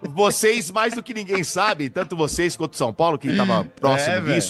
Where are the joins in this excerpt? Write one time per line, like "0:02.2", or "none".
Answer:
none